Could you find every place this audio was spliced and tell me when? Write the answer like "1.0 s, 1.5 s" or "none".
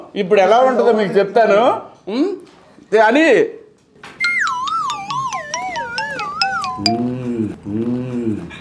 none